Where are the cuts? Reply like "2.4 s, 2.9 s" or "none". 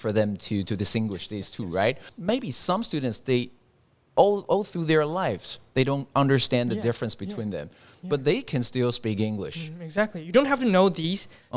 2.1 s